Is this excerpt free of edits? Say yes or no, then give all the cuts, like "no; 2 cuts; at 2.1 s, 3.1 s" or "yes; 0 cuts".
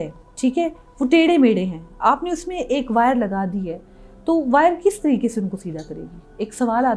yes; 0 cuts